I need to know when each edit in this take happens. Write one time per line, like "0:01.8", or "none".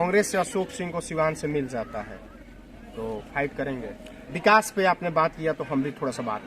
0:04.3

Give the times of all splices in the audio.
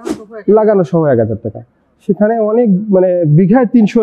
none

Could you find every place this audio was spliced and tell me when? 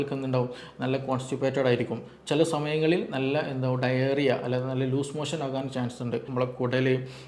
0:06.3

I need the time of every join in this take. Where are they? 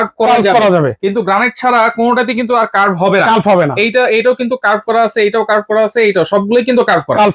none

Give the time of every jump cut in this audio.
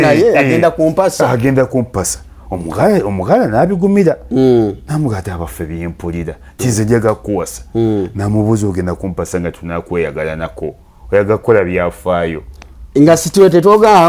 0:04.8

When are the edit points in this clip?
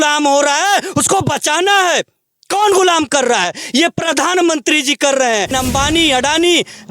0:05.5

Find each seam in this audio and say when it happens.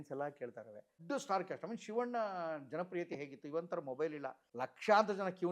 0:00.9
0:04.4

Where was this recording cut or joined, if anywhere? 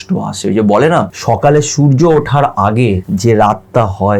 0:01.1
0:03.1

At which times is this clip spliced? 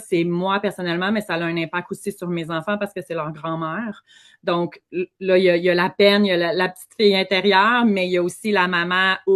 none

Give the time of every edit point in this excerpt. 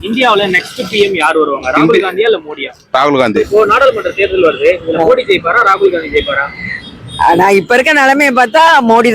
0:03.3

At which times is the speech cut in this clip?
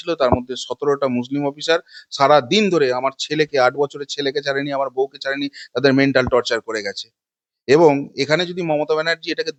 none

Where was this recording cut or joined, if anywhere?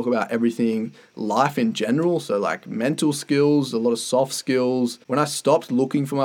0:05.0

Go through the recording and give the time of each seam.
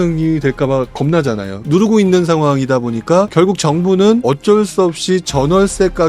0:01.5
0:03.3
0:04.2

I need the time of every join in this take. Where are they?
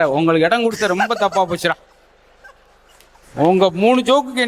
none

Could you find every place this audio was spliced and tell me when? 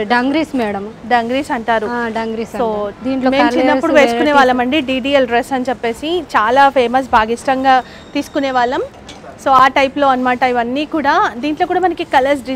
none

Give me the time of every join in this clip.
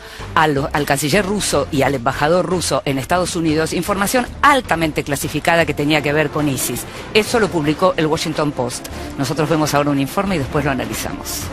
0:01.9

